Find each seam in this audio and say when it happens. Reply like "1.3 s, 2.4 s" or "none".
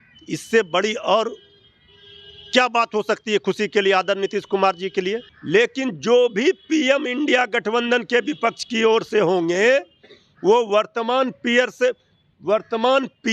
5.3 s